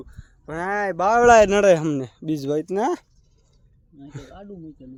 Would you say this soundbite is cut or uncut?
uncut